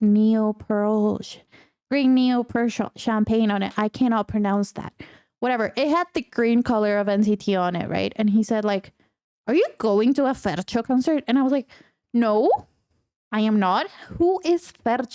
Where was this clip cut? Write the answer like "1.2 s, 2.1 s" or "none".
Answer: 10.8 s